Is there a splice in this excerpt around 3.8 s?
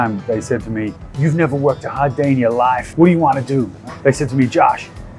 yes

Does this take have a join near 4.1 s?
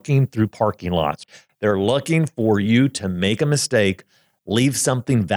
no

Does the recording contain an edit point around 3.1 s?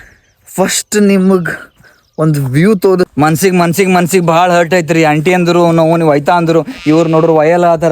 yes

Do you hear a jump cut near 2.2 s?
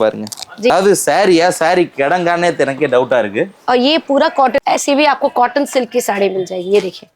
no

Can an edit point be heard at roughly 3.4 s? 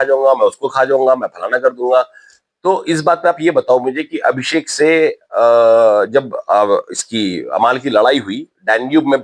no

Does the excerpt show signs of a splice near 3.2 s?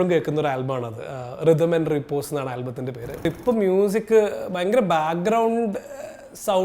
yes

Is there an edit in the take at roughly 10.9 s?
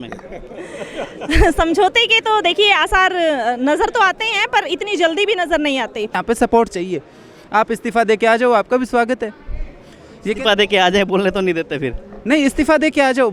no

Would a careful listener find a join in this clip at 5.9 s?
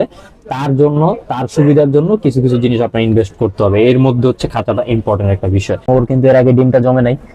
yes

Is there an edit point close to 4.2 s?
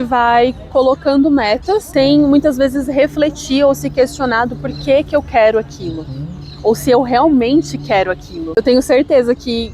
no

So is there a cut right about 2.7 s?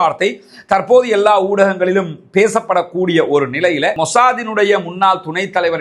no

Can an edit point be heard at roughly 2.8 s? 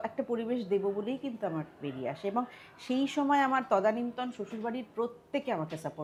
no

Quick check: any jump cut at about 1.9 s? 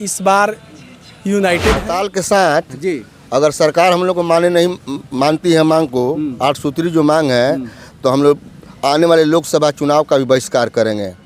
yes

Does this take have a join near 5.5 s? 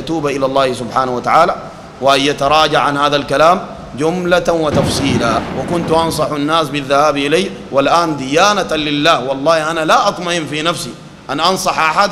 yes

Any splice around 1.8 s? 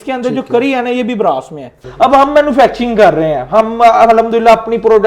yes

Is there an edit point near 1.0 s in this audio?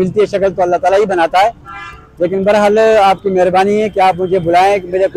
no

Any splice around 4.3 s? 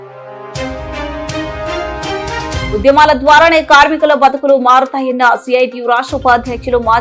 no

